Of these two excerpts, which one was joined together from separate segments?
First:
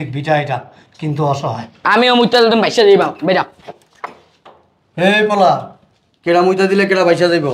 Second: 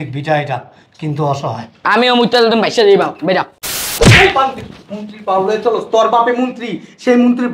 second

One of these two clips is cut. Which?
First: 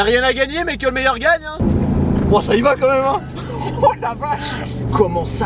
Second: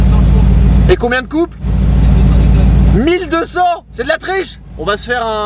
first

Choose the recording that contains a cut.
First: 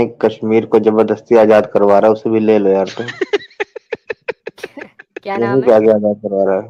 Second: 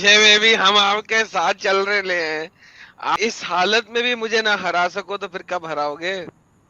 second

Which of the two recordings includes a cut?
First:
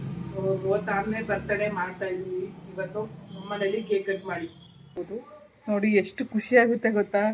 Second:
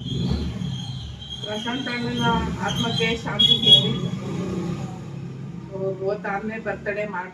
first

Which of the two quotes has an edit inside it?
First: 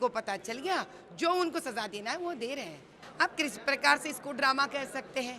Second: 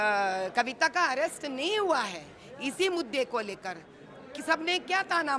first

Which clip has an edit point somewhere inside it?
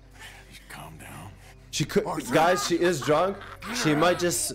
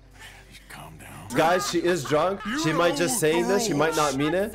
second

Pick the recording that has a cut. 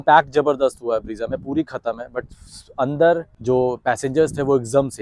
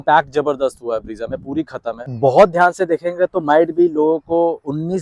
second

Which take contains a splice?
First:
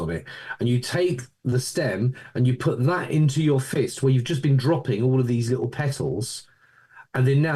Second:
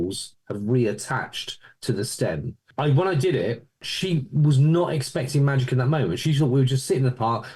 second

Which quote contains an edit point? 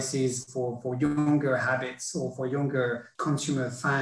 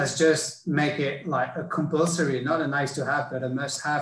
first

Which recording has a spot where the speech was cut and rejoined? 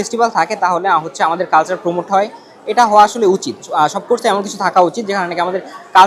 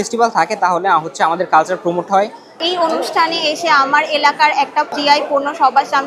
second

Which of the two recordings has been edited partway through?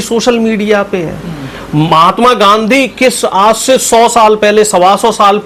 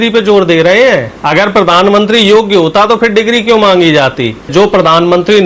second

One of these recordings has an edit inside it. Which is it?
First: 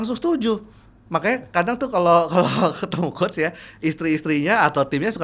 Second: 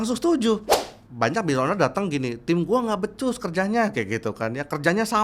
second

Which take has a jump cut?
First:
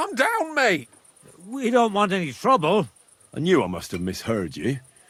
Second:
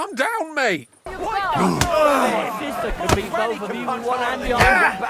second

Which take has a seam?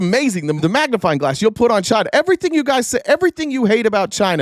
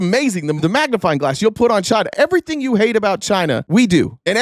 second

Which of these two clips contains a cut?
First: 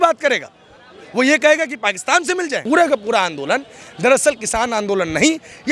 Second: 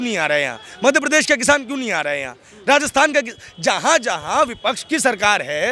first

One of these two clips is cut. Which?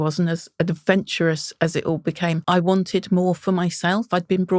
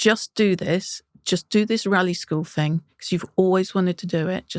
first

